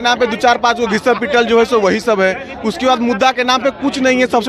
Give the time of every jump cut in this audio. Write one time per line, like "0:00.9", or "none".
none